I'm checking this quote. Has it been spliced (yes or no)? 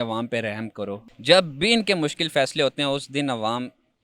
yes